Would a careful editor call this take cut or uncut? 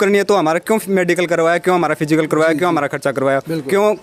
uncut